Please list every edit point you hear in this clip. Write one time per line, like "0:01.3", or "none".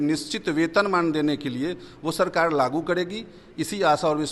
none

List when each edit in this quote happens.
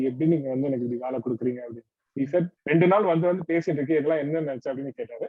0:02.5

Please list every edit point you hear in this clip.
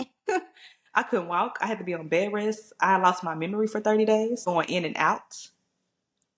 0:04.4

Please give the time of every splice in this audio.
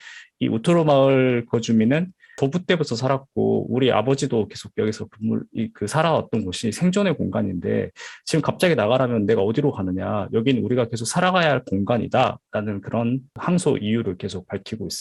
0:02.3
0:13.3

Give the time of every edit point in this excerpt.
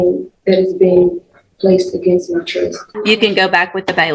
0:02.9

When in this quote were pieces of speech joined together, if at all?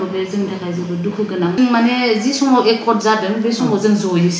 0:01.6

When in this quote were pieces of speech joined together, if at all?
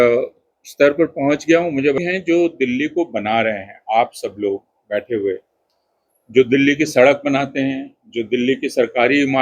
0:02.0

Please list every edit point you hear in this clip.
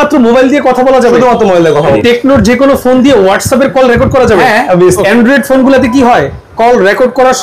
0:02.0
0:05.0

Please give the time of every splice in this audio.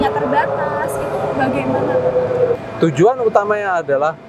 0:02.6

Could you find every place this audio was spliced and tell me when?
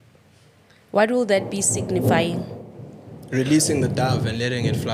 none

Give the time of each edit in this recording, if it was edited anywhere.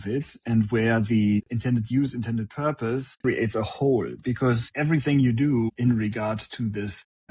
0:03.1

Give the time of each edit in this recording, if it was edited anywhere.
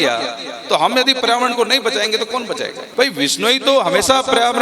0:02.8

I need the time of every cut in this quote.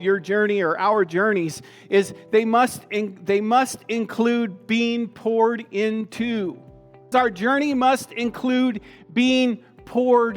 0:07.1

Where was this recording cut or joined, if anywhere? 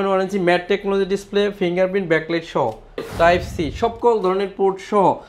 0:03.0

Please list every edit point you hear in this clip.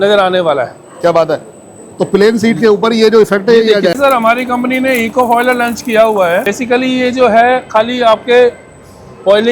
0:04.0
0:06.5

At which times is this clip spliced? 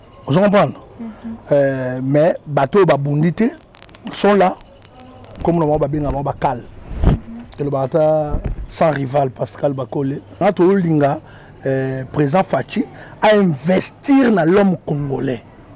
0:10.4

